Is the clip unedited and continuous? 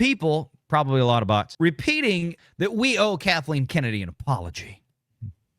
no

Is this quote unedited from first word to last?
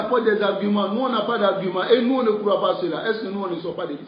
yes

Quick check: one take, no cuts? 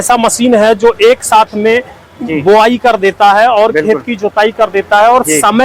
yes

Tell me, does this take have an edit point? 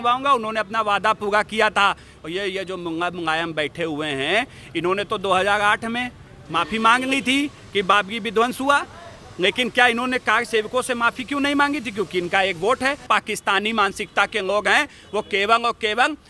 yes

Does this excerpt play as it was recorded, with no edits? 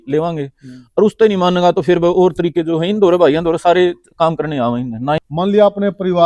no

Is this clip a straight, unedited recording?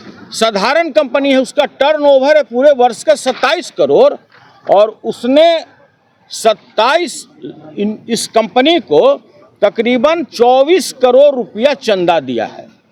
yes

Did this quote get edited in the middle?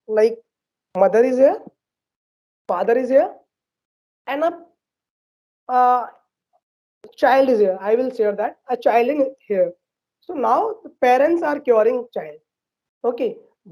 no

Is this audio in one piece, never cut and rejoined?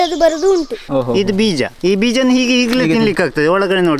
no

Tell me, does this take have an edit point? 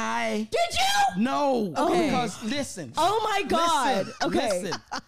no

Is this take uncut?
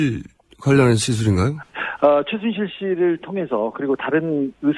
no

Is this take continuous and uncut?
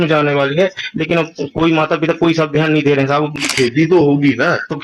no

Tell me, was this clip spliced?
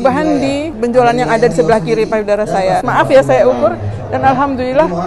yes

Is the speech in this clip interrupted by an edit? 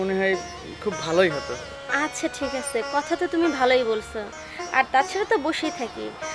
no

